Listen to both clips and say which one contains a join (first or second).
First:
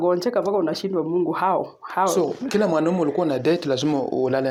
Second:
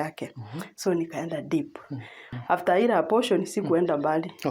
second